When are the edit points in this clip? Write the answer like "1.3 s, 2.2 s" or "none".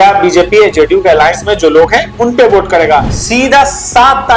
3.2 s